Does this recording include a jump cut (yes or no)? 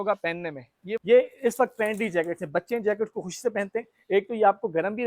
yes